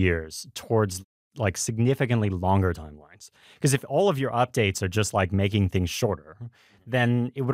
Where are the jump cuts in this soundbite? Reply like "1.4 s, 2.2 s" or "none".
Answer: 1.2 s